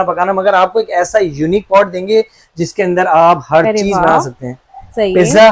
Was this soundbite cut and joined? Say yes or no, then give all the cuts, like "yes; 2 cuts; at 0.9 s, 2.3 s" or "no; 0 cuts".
no; 0 cuts